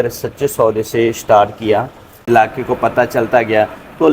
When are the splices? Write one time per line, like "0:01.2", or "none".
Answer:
0:02.2